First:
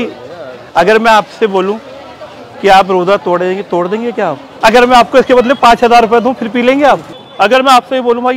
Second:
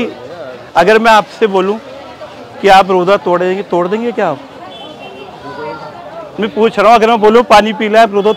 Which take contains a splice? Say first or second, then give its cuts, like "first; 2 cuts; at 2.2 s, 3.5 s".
first; 2 cuts; at 4.5 s, 7.2 s